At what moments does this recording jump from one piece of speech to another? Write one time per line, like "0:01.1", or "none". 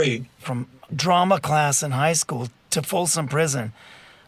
0:00.8
0:02.6